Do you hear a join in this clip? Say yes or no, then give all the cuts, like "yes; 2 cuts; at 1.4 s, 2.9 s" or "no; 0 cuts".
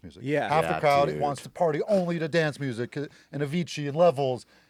no; 0 cuts